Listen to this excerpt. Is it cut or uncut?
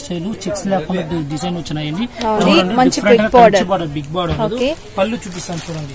cut